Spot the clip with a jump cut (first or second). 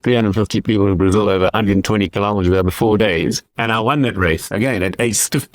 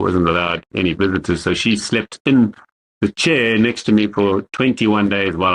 first